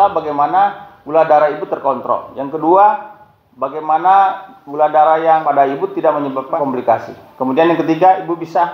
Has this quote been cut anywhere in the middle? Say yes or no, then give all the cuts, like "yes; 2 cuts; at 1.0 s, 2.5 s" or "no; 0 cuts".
yes; 2 cuts; at 5.4 s, 6.6 s